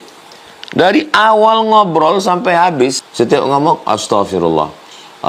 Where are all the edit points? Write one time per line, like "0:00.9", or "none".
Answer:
0:03.0